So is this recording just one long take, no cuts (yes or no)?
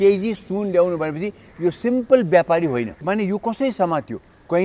no